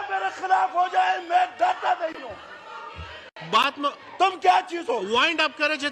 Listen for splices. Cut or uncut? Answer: uncut